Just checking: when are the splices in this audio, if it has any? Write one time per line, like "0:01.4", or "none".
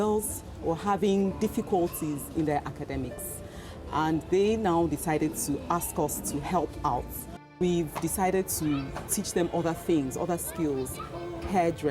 0:07.5